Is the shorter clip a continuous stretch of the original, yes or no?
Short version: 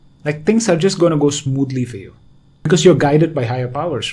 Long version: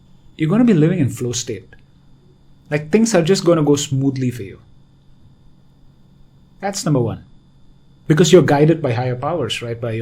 no